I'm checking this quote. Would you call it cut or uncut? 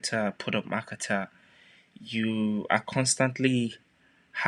uncut